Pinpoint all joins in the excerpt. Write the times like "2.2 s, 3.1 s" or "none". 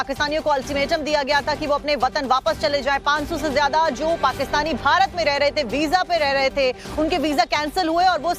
6.6 s